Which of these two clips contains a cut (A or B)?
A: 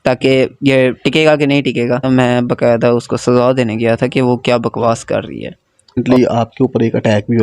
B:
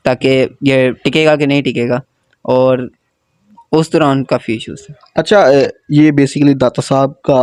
A